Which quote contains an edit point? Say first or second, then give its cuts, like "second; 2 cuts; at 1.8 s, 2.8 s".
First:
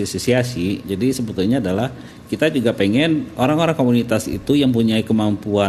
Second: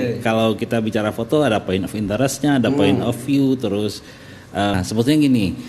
second; 1 cut; at 4.7 s